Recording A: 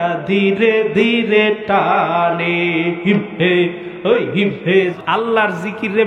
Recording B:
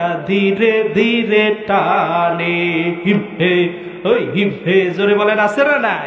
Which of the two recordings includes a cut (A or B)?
A